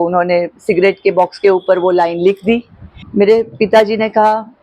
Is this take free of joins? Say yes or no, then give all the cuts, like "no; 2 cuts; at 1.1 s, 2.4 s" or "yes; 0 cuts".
no; 1 cut; at 3.0 s